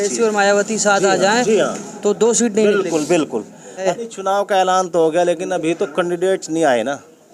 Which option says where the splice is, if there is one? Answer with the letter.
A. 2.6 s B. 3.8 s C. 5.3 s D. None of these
B